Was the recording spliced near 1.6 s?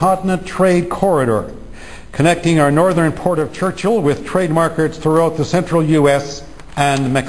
yes; 1 cut; at 1.6 s

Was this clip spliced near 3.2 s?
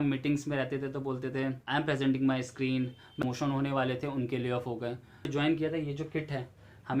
yes; 3 cuts; at 1.6 s, 3.2 s, 5.3 s

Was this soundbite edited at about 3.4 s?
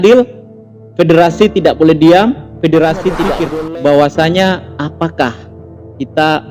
yes; 1 cut; at 3.4 s

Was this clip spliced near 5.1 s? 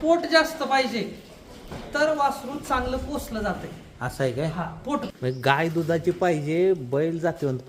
yes; 1 cut; at 5.1 s

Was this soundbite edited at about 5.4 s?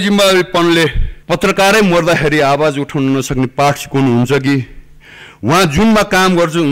no; 1 cut; at 1.1 s

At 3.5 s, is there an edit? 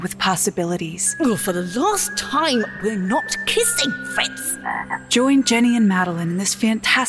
no; 2 cuts; at 1.1 s, 5.0 s

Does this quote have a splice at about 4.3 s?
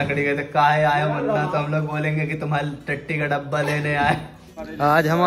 yes; 1 cut; at 4.3 s

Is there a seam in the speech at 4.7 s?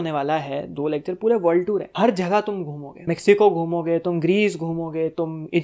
no; 2 cuts; at 1.9 s, 2.9 s

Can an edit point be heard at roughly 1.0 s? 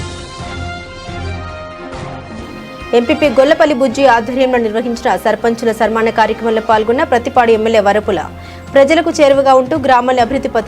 no; 1 cut; at 2.3 s

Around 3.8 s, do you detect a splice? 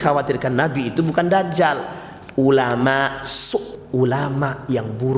yes; 1 cut; at 3.8 s

